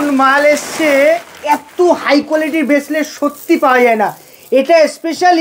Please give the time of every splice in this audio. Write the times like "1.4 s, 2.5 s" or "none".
none